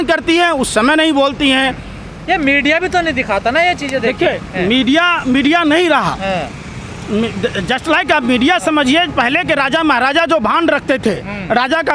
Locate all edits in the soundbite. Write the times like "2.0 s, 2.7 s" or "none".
none